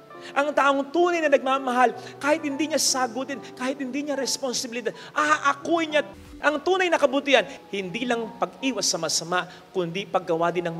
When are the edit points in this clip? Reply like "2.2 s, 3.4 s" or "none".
6.2 s, 7.5 s